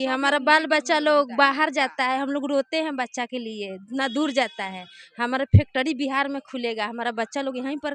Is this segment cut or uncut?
uncut